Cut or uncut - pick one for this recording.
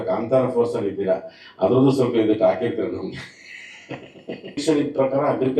cut